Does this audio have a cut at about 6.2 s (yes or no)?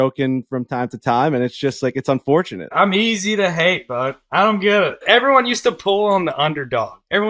no